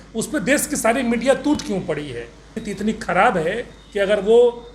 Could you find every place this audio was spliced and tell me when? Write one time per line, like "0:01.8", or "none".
0:02.6